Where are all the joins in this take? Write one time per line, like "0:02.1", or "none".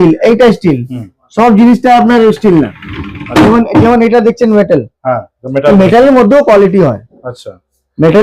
none